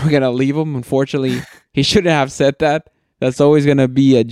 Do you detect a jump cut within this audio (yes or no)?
no